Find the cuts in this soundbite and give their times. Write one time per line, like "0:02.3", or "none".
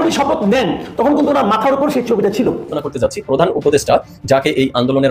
0:02.8

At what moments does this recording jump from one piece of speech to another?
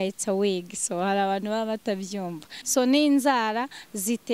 0:02.6

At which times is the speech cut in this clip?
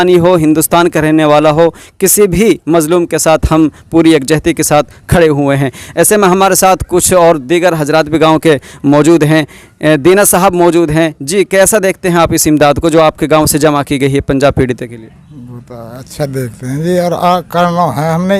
none

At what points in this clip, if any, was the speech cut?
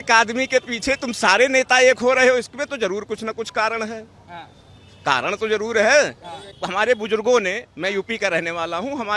0:06.6

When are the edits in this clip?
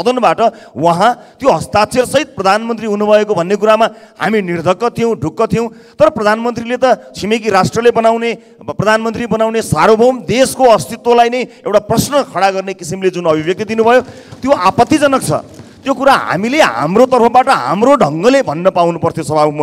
none

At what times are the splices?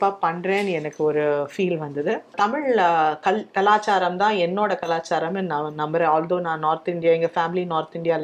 0:02.3

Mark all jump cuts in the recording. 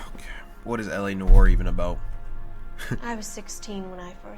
none

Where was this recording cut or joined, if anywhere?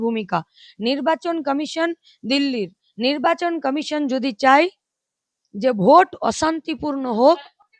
none

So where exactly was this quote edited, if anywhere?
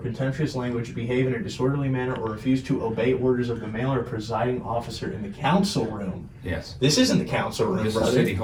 none

